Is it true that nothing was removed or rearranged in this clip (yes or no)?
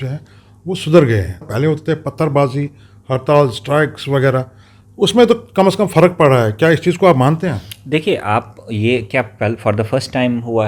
no